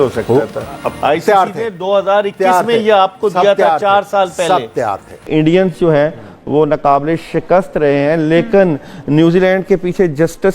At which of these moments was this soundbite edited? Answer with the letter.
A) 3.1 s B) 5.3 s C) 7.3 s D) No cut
B